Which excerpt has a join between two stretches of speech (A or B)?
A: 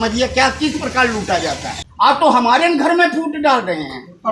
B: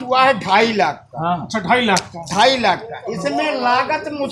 A